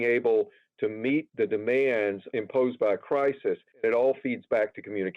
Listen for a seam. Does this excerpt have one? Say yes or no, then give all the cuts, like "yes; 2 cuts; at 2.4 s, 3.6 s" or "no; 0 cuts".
yes; 3 cuts; at 1.3 s, 2.2 s, 3.8 s